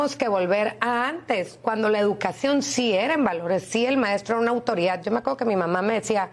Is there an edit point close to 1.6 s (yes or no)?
no